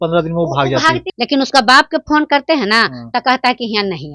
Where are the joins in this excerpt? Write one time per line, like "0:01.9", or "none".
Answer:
0:01.1